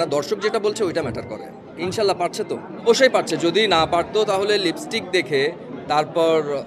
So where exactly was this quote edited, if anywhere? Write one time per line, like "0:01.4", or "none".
0:01.6
0:02.8